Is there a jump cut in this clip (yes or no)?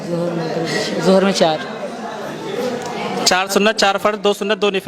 no